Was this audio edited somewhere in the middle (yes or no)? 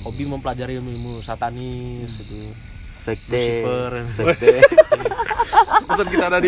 no